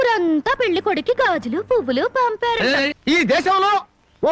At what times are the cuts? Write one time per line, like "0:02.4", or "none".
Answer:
0:03.0

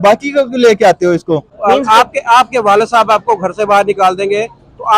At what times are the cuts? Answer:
0:01.5

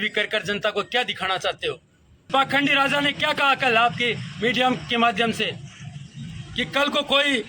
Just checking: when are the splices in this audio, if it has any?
0:02.3

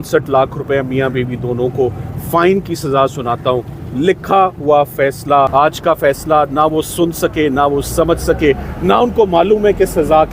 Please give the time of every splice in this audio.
0:05.5

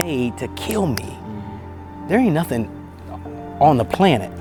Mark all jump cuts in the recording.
none

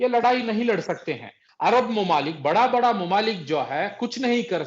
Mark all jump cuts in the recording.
0:01.4

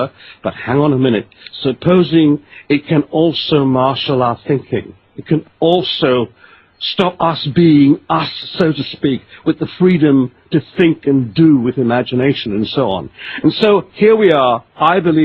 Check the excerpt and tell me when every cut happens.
none

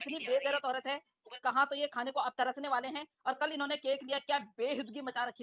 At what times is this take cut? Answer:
none

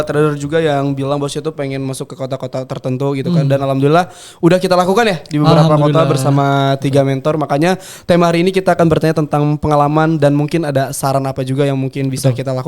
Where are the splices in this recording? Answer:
none

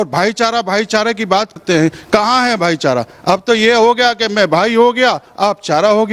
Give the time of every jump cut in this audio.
0:01.6

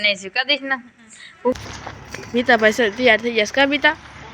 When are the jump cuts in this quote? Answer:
0:01.5

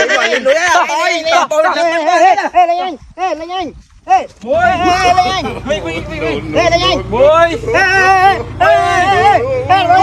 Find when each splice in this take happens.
none

